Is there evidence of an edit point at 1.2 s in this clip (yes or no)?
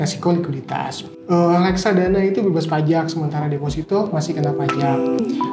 yes